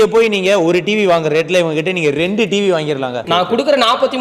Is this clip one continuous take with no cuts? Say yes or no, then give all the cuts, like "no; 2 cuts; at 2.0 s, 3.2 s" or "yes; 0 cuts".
no; 1 cut; at 3.2 s